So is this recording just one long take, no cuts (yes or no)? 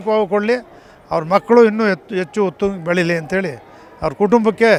yes